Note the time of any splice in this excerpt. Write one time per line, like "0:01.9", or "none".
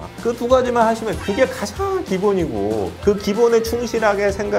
0:02.9